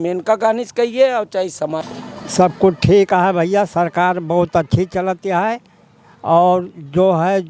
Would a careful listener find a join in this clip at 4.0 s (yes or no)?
no